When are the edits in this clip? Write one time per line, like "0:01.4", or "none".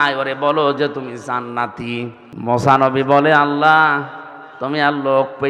0:02.2